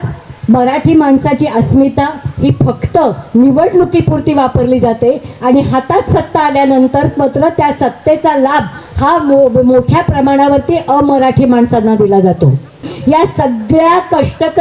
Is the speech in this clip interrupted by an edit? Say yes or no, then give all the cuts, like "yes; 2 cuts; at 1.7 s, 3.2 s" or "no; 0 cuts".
yes; 1 cut; at 12.9 s